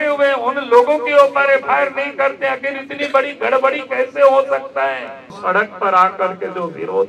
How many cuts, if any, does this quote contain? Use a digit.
1